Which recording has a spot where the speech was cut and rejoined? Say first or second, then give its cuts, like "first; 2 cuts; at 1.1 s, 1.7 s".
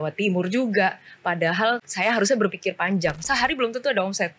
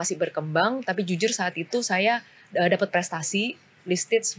first; 2 cuts; at 1.9 s, 3.2 s